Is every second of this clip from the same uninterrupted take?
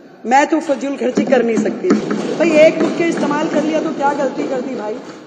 no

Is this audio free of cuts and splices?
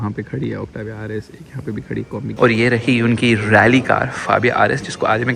no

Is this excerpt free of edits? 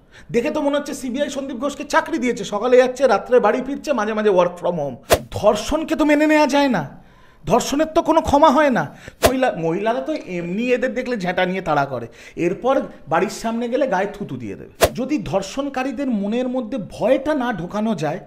no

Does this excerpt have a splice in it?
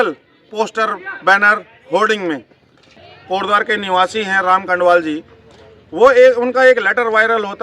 yes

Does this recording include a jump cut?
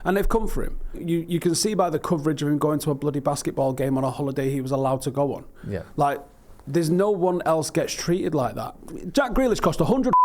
yes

